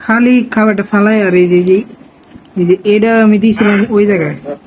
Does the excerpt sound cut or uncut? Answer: uncut